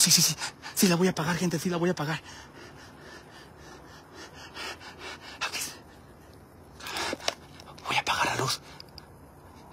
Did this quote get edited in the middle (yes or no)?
no